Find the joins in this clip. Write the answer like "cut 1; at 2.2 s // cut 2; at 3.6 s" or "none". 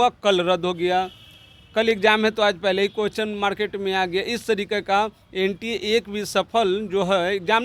none